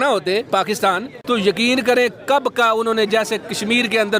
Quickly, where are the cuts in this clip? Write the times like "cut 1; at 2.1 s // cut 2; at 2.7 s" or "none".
cut 1; at 1.1 s